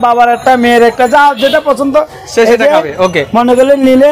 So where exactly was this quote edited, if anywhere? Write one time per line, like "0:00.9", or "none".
none